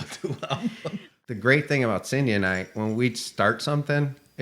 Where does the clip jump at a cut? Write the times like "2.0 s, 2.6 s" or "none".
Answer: 1.1 s